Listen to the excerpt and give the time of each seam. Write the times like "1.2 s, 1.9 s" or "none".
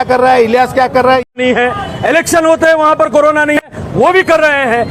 1.3 s